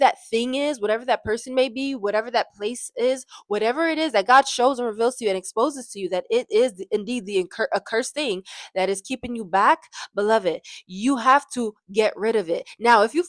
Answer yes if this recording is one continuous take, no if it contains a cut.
yes